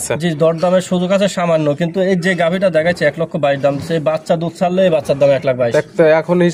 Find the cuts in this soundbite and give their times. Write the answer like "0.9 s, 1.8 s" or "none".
none